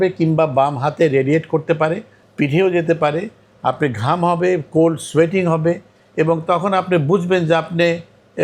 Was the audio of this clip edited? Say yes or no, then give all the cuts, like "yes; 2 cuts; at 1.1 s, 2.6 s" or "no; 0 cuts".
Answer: no; 0 cuts